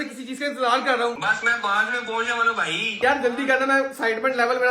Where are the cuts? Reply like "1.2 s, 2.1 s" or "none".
1.2 s, 3.0 s